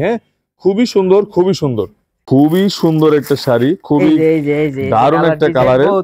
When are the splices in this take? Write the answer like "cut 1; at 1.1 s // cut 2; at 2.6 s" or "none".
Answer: cut 1; at 2.3 s